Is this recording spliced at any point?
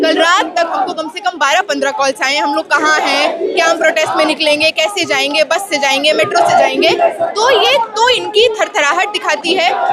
no; 0 cuts

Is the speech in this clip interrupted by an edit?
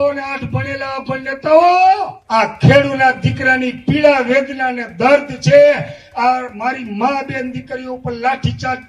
yes; 1 cut; at 2.2 s

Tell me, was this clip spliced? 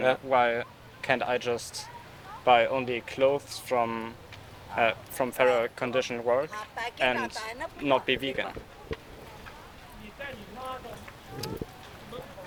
no; 0 cuts

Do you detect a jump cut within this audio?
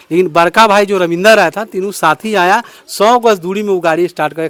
no; 0 cuts

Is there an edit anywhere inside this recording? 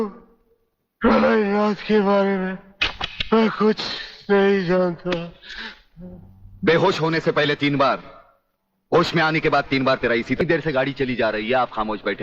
yes; 1 cut; at 10.4 s

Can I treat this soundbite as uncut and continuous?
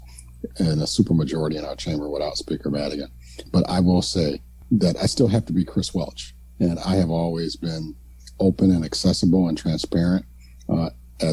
no; 2 cuts; at 3.3 s, 4.5 s

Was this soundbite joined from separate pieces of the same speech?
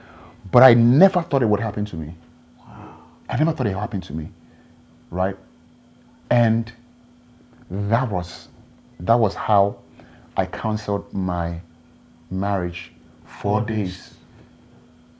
no; 0 cuts

